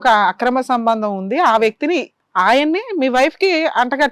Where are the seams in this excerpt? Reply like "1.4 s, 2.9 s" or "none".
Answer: 2.2 s

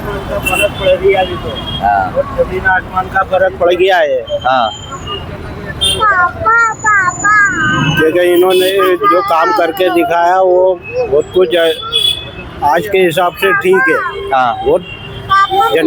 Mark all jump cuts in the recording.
none

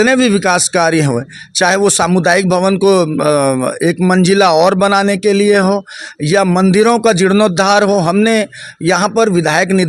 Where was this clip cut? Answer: none

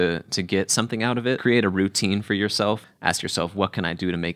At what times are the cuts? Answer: 1.4 s, 2.8 s

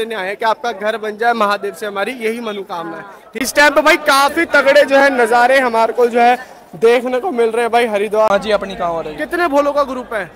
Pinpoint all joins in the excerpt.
3.5 s, 8.3 s

